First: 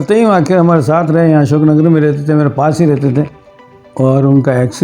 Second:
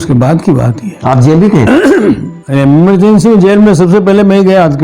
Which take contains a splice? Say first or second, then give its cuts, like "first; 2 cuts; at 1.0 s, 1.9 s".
first; 1 cut; at 3.4 s